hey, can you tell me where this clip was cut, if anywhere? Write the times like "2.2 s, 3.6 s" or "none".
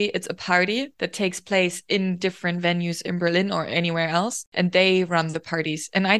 1.0 s, 4.4 s